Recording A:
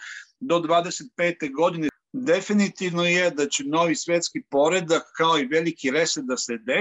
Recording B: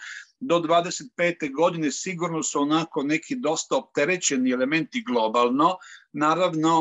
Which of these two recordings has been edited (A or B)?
A